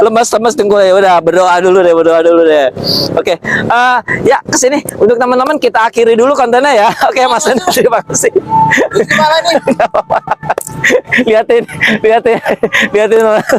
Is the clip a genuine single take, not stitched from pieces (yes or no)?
yes